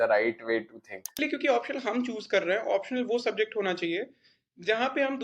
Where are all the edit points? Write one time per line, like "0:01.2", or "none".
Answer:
0:01.2

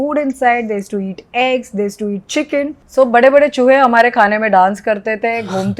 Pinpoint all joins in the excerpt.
0:02.8

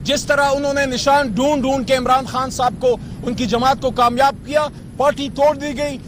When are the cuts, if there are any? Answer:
0:04.8

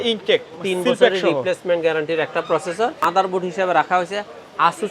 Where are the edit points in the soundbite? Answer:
0:03.0

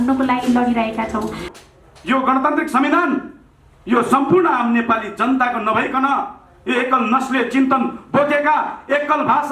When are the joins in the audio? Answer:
0:01.5

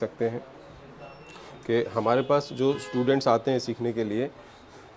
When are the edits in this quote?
none

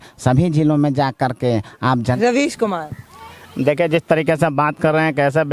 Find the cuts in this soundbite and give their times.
0:02.1

